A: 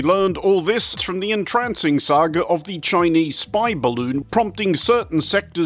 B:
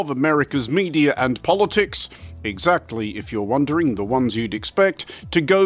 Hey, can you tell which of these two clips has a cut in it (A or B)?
A